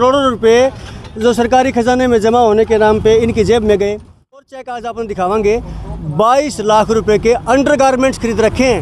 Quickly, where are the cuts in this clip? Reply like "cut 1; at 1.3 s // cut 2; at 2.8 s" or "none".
cut 1; at 4.6 s